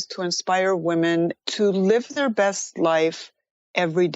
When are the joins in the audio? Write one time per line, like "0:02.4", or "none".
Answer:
0:01.4
0:02.1